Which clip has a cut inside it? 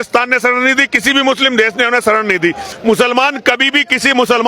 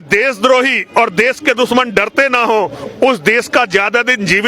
first; 1 cut; at 2.7 s

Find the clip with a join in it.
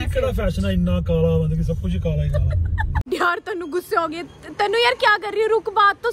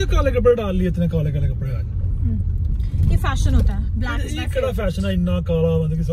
first; 1 cut; at 3.0 s

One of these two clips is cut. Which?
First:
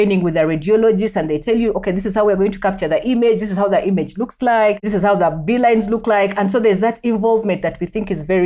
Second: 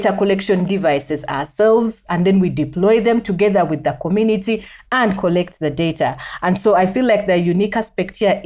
first; 1 cut; at 4.9 s

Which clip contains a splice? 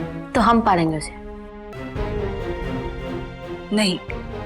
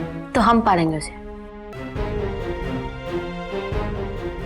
first; 1 cut; at 3.0 s

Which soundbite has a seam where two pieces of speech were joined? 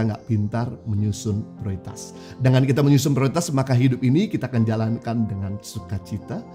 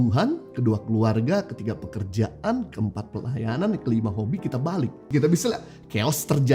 second; 1 cut; at 5.0 s

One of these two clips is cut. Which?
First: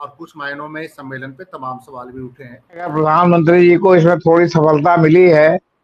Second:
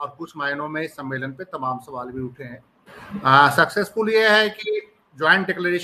first; 1 cut; at 2.9 s

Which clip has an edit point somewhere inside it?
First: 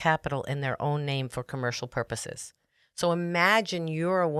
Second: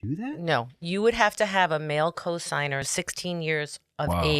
second; 1 cut; at 2.9 s

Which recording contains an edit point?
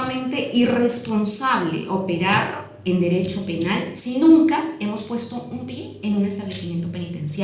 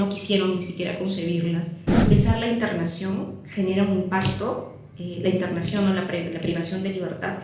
second; 1 cut; at 2.1 s

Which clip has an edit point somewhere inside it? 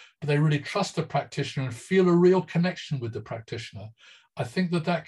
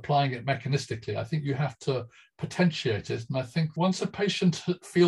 second; 1 cut; at 3.7 s

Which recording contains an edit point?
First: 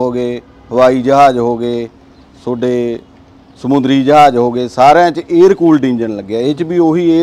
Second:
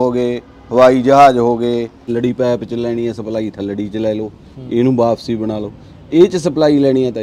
second; 1 cut; at 2.0 s

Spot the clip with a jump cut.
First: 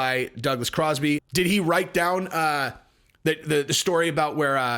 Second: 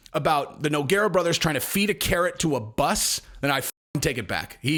first; 1 cut; at 1.3 s

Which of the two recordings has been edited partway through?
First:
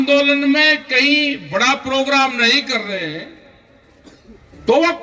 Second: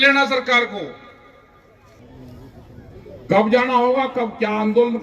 second; 1 cut; at 2.0 s

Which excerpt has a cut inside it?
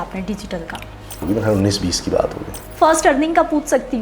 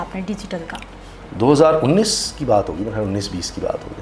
first; 2 cuts; at 1.2 s, 2.6 s

